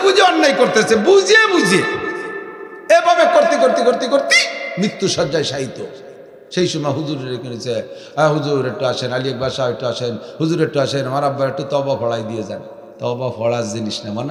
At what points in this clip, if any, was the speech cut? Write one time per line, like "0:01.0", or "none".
none